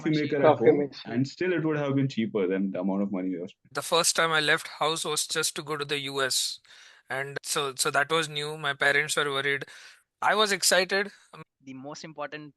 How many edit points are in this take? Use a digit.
2